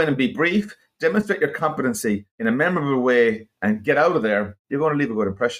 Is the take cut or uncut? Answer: cut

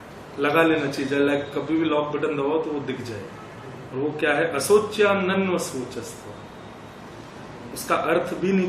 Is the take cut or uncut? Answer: uncut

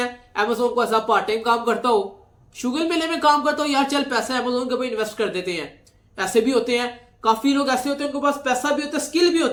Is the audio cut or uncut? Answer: uncut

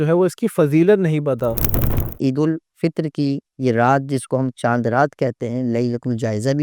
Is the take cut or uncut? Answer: cut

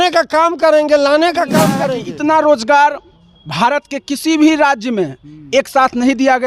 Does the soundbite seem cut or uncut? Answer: cut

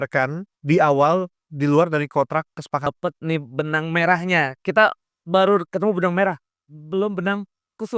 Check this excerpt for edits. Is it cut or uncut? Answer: cut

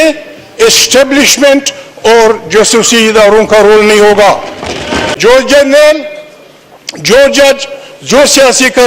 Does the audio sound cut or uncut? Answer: cut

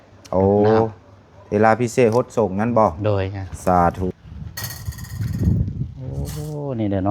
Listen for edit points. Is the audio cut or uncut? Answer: cut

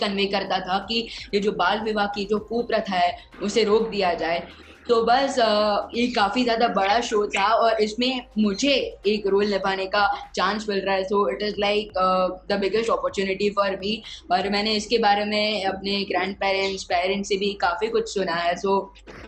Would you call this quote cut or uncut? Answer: uncut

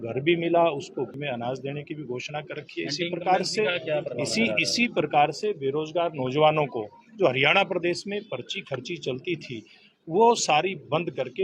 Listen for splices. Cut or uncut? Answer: cut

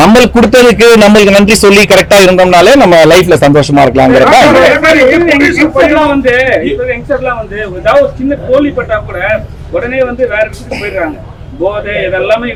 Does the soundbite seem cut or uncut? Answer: uncut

